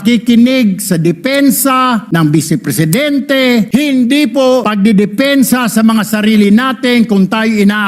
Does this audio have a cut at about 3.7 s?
yes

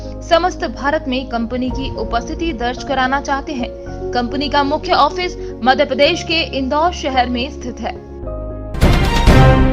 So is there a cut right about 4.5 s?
no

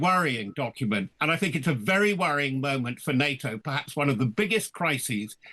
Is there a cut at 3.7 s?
no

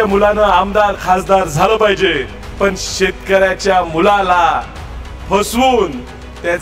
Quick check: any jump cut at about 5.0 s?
no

